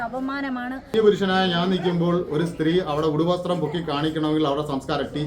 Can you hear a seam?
yes; 1 cut; at 0.9 s

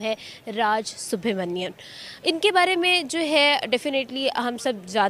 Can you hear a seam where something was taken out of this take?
no; 0 cuts

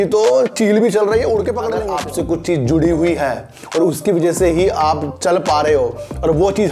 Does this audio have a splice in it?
yes; 1 cut; at 1.8 s

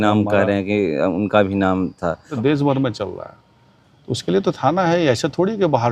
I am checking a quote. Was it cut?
yes; 1 cut; at 2.3 s

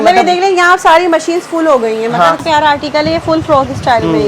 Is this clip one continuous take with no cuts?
no; 1 cut; at 2.4 s

